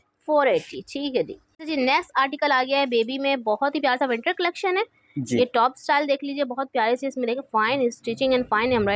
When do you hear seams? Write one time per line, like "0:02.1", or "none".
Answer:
none